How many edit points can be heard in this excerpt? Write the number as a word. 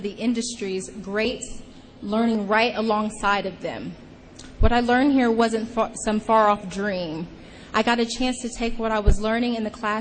one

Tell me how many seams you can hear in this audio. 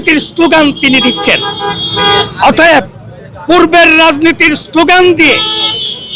zero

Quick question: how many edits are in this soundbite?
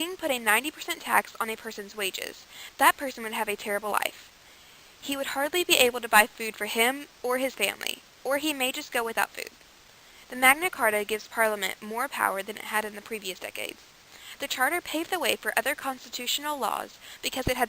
one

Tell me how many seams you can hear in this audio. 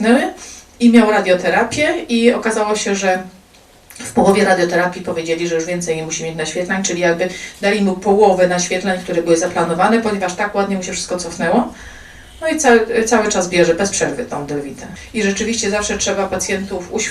one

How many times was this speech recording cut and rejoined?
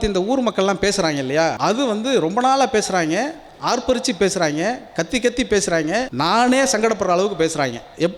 two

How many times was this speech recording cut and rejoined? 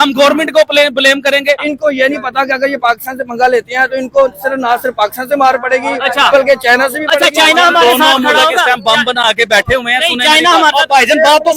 one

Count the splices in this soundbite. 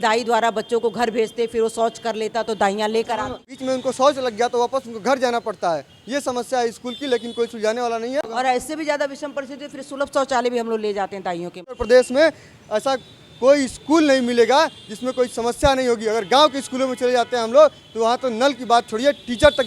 three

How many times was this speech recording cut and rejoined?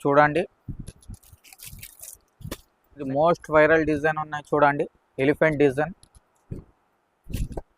one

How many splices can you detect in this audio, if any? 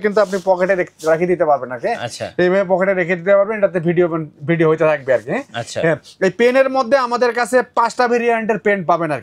zero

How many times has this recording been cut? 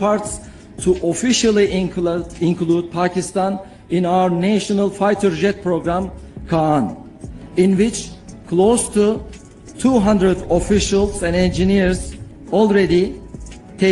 zero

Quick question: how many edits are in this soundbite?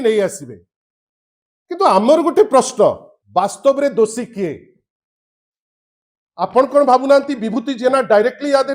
one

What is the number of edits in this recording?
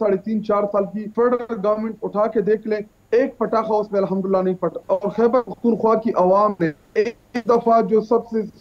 two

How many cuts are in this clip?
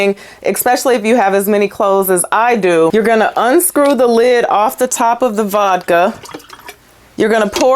one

